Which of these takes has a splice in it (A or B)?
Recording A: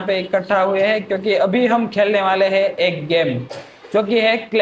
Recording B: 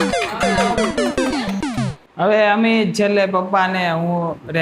B